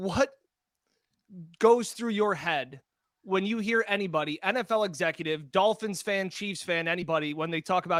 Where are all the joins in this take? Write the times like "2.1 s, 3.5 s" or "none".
none